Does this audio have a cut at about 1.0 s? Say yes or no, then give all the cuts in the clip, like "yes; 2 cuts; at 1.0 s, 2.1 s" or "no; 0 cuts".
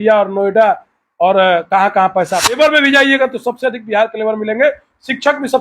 no; 1 cut; at 2.6 s